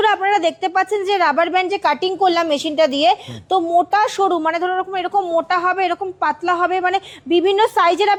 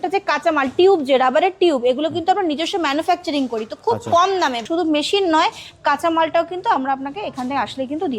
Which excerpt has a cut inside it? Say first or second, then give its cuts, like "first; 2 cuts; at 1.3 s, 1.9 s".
second; 1 cut; at 4.6 s